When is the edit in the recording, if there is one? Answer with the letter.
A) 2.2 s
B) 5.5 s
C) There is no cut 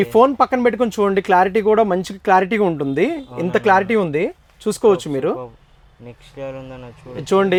C